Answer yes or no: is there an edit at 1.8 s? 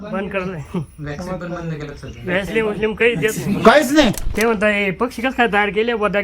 no